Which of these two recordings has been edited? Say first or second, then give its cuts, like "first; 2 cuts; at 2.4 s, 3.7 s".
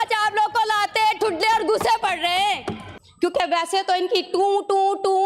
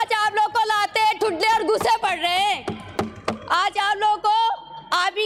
first; 1 cut; at 3.2 s